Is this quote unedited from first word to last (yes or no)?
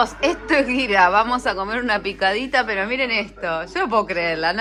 yes